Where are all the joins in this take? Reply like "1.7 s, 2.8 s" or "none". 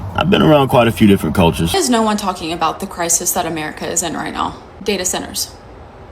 1.7 s